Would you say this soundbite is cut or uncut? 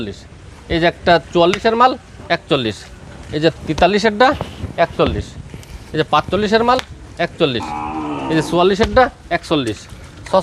uncut